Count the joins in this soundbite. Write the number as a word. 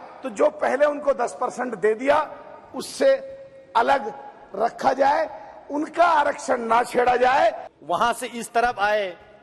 one